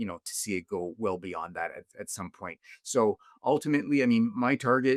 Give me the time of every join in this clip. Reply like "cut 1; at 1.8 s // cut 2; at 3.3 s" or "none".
none